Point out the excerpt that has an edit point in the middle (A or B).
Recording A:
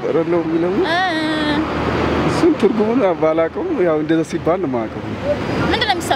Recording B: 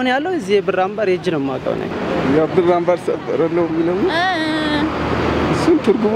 B